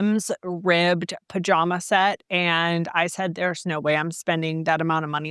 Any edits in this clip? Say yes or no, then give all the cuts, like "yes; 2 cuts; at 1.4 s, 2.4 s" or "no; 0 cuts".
no; 0 cuts